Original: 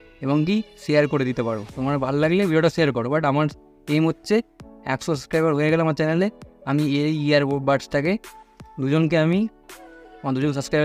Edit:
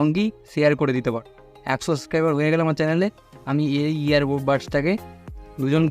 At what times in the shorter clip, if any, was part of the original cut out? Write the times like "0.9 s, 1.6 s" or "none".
1.4 s